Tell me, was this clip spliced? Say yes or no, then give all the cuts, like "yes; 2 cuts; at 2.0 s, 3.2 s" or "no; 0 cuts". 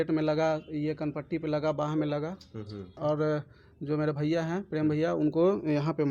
yes; 1 cut; at 2.9 s